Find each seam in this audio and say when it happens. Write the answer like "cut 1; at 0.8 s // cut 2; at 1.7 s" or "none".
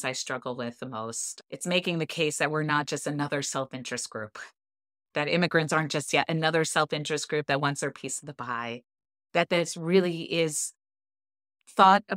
cut 1; at 5.1 s